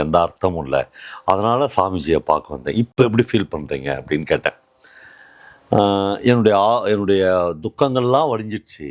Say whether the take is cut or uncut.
uncut